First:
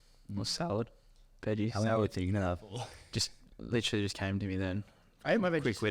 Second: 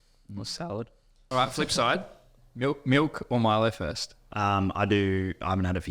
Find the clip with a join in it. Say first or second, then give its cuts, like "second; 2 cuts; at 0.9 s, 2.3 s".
second; 2 cuts; at 1.2 s, 4.3 s